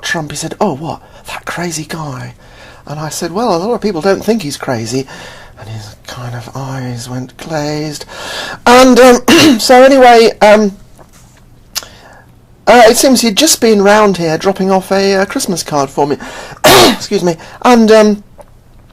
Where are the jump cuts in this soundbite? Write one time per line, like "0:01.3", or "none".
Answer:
0:00.9